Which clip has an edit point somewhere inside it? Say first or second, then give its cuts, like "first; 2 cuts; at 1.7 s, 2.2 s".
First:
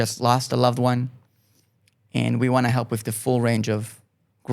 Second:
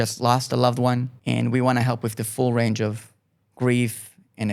second; 1 cut; at 1.1 s